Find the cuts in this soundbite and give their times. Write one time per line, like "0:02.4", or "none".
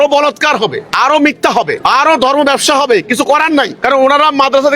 0:00.8
0:01.8
0:03.7